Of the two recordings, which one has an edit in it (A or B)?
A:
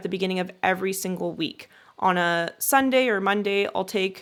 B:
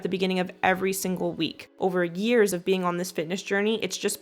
B